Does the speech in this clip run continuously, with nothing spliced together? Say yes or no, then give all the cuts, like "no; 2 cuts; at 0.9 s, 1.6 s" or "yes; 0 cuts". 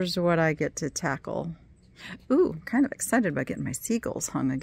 yes; 0 cuts